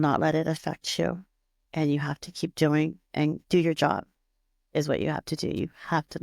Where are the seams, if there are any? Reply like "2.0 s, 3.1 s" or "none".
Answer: 3.4 s